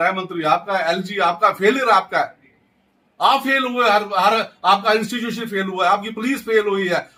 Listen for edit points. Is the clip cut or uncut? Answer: uncut